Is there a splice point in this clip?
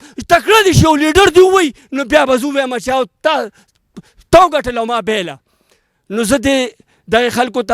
no; 0 cuts

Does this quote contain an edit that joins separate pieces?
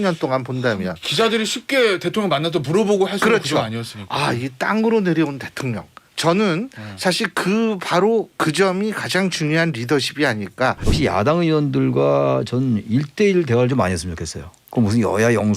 yes; 1 cut; at 10.8 s

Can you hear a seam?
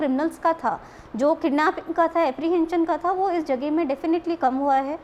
no; 0 cuts

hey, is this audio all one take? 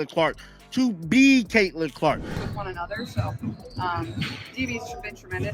no; 1 cut; at 2.3 s

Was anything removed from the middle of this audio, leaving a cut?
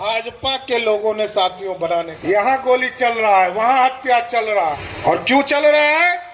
yes; 2 cuts; at 2.1 s, 4.9 s

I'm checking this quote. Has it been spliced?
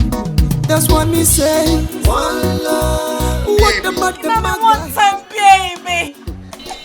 yes; 1 cut; at 4.2 s

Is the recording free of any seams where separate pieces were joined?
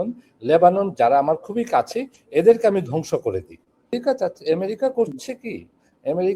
no; 1 cut; at 4.0 s

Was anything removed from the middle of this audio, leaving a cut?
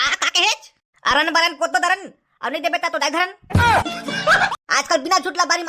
yes; 1 cut; at 4.5 s

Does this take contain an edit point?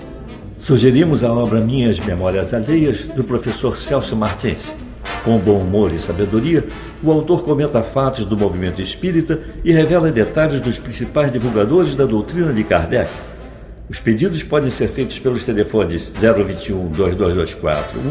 no; 0 cuts

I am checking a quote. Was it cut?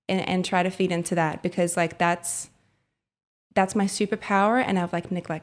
no; 0 cuts

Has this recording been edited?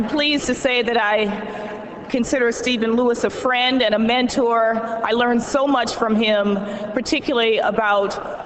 yes; 1 cut; at 5.3 s

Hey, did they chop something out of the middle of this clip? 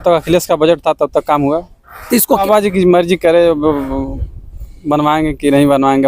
yes; 1 cut; at 2.4 s

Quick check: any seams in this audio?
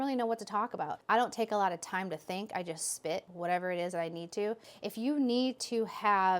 yes; 2 cuts; at 1.0 s, 4.6 s

